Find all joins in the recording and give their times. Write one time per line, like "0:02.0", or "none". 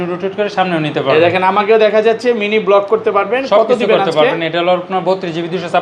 none

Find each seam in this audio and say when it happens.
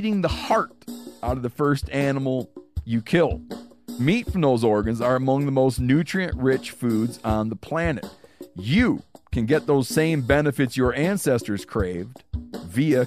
none

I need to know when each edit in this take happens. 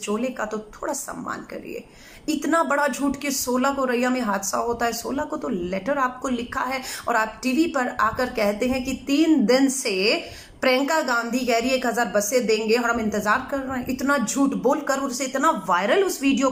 none

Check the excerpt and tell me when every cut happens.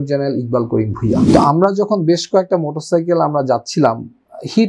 0:01.2

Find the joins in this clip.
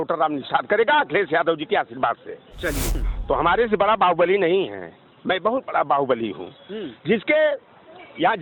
0:03.0

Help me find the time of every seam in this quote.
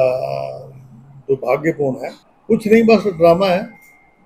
none

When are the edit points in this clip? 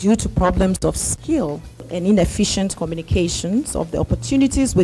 0:01.9

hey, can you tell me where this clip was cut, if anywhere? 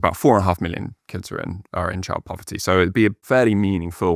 0:03.2

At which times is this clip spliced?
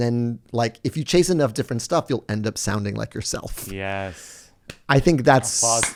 none

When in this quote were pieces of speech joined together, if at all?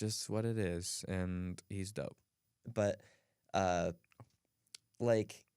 0:02.4

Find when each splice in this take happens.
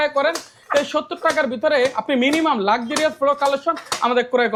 none

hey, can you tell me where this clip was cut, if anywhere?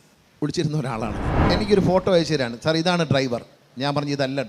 0:01.5

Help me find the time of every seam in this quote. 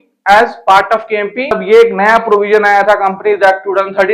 0:01.6

